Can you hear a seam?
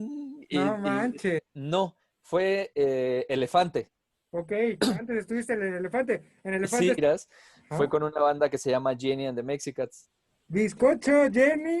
yes; 2 cuts; at 1.5 s, 7.0 s

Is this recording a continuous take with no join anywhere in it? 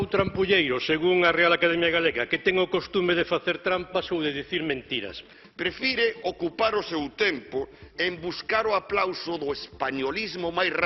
no; 1 cut; at 5.3 s

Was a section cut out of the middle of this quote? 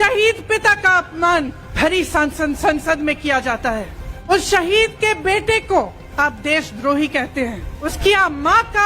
yes; 4 cuts; at 1.6 s, 4.3 s, 6.0 s, 7.8 s

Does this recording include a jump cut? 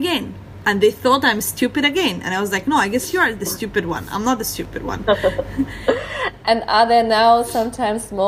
no; 0 cuts

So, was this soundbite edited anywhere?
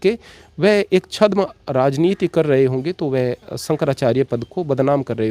no; 0 cuts

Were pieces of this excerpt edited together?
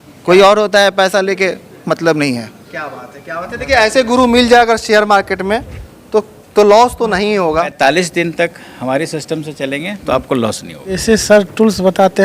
yes; 2 cuts; at 7.7 s, 10.9 s

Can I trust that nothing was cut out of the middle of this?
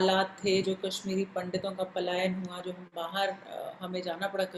yes; 0 cuts

